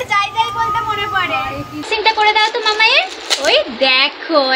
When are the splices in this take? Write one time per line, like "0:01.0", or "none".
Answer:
0:01.9